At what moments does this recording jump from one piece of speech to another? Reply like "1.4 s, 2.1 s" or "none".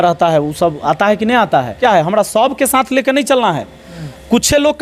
1.8 s